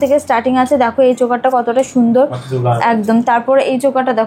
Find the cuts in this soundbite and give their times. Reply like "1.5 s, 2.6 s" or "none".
none